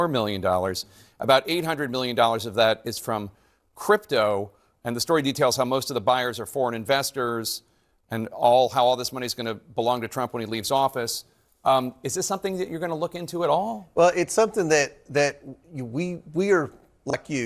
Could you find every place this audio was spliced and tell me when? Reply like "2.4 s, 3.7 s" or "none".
none